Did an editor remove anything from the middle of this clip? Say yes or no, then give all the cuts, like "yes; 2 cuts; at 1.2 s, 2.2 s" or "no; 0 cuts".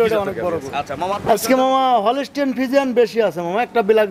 yes; 1 cut; at 1.0 s